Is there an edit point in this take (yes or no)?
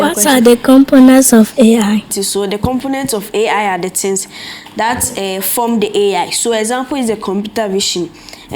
yes